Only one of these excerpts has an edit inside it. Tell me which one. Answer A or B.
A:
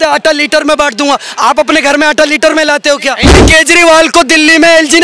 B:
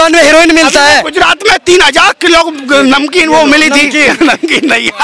A